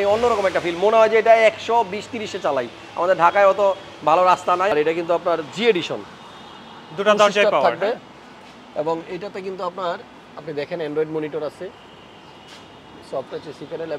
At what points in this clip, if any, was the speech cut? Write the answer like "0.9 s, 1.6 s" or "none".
4.7 s